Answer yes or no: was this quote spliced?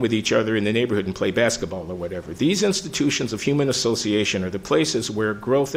no